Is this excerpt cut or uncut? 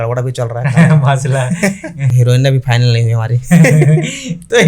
cut